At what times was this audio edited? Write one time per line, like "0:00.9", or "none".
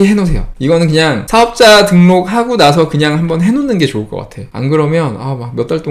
none

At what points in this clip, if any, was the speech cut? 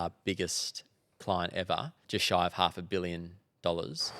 0:02.0

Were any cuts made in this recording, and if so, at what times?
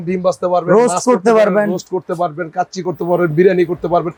none

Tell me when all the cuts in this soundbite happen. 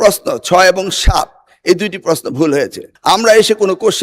0:02.9

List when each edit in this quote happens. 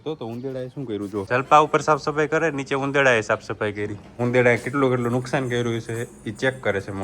0:01.3
0:04.0

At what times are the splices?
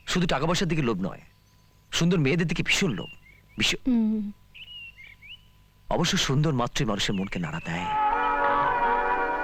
none

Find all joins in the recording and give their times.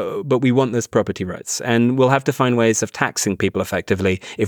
none

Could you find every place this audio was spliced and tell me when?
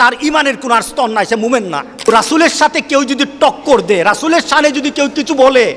0:01.8

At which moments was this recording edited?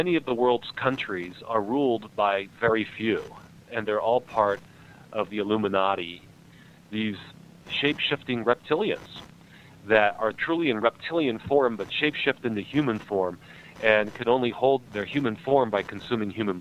0:03.6
0:05.3
0:06.4
0:07.6
0:10.4
0:14.8

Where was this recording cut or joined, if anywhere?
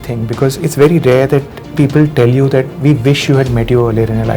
0:01.7

